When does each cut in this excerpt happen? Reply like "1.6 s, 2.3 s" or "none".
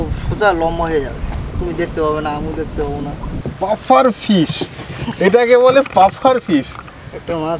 3.3 s